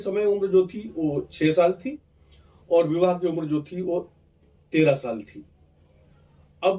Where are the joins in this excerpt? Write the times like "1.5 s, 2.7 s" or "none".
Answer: none